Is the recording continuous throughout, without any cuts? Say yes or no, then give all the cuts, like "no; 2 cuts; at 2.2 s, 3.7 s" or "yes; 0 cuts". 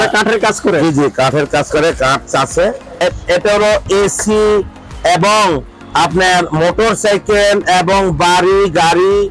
no; 1 cut; at 3.0 s